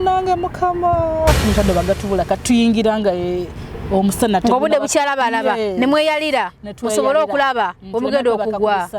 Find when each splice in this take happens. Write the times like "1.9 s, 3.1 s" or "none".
1.4 s